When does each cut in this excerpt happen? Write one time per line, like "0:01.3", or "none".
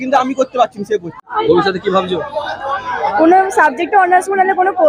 0:01.2